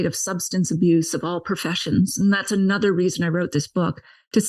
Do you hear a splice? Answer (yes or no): no